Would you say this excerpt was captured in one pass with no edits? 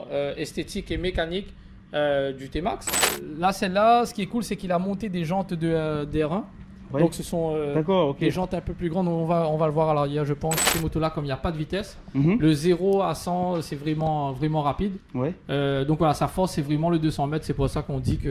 no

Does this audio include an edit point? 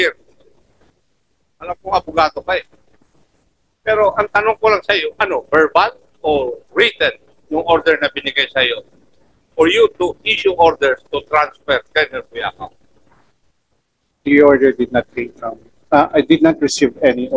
no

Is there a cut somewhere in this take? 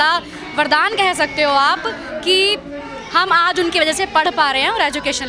no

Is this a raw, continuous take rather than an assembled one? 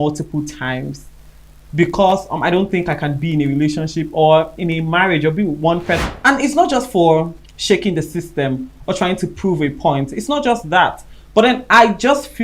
no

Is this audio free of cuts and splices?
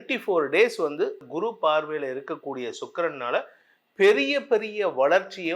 no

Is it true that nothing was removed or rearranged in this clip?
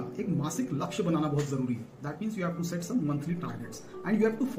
yes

